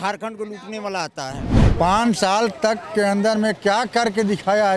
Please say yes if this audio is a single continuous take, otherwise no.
no